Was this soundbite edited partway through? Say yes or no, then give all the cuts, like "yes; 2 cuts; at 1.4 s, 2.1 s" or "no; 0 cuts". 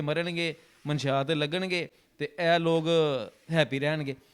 no; 0 cuts